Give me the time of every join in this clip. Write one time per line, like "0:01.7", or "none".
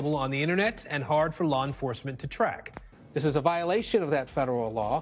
0:02.9